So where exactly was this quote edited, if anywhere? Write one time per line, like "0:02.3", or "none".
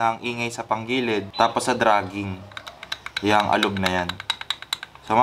none